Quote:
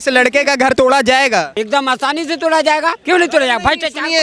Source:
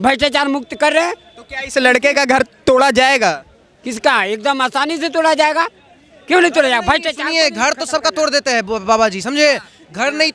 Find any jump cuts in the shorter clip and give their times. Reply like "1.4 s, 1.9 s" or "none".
0.7 s, 1.5 s, 3.0 s